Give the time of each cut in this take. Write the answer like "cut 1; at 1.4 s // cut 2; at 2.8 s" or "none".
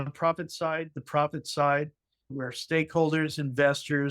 cut 1; at 2.3 s

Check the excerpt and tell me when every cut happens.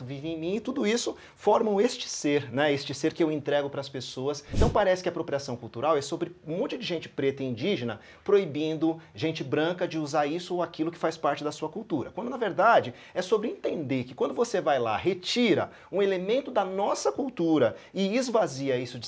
cut 1; at 4.5 s

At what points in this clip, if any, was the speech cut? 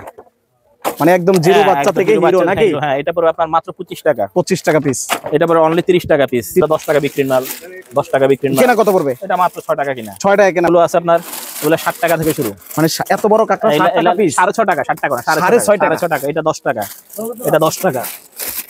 cut 1; at 6.6 s // cut 2; at 10.7 s

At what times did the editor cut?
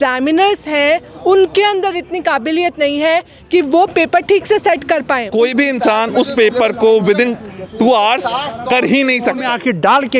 cut 1; at 5.2 s // cut 2; at 9.4 s

